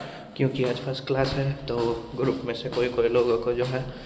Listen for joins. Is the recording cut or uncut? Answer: uncut